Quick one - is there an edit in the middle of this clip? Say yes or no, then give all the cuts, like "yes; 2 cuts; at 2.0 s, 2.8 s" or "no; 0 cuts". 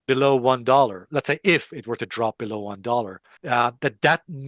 no; 0 cuts